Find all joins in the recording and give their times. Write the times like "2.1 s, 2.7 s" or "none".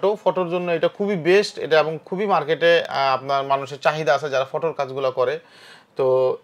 none